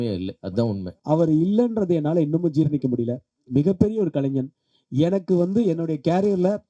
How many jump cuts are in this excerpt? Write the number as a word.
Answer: one